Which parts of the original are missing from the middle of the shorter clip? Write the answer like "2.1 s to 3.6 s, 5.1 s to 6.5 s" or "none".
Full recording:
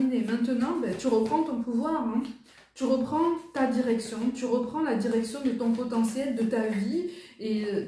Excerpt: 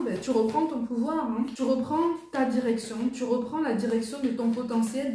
2.3 s to 2.7 s